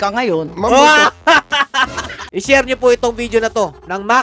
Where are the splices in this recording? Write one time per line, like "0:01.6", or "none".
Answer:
0:02.2